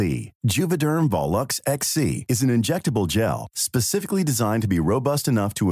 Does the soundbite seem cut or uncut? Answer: uncut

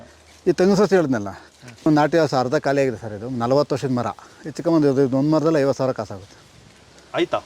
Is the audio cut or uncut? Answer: cut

